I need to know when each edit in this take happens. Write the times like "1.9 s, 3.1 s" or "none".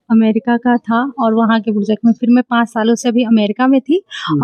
none